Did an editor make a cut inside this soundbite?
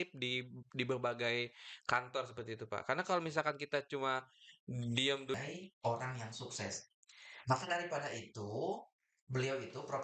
yes; 1 cut; at 5.4 s

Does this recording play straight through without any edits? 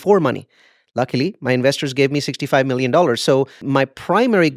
no; 1 cut; at 3.6 s

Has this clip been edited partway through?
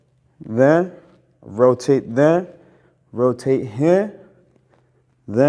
no; 0 cuts

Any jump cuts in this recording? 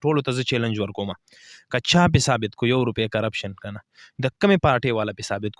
no; 0 cuts

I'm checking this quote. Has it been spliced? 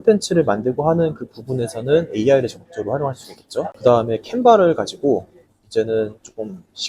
yes; 1 cut; at 3.7 s

